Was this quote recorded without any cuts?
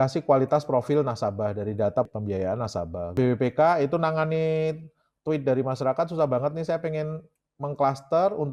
yes; 0 cuts

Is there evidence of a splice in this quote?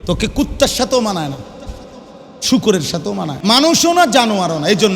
yes; 1 cut; at 3.3 s

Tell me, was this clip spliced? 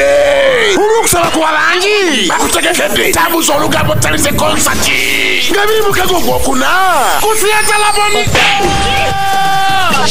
no; 0 cuts

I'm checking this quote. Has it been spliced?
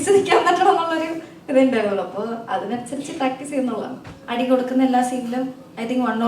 yes; 1 cut; at 4.2 s

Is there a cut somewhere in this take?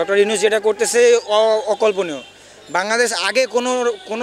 no; 0 cuts

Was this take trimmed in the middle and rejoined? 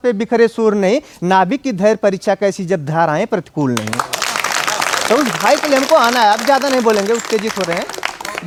no; 0 cuts

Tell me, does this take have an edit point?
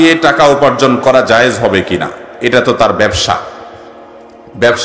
no; 0 cuts

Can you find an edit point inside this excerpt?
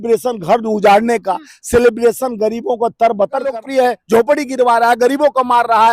yes; 1 cut; at 3.5 s

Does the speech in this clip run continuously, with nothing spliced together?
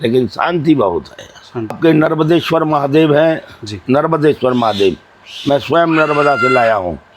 no; 1 cut; at 1.8 s

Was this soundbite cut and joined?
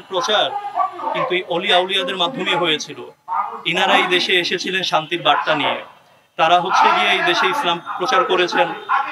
no; 0 cuts

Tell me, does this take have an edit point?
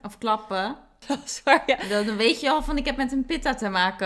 yes; 1 cut; at 1.0 s

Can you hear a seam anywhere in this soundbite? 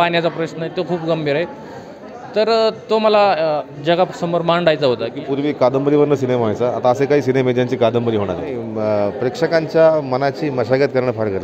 yes; 2 cuts; at 5.2 s, 8.6 s

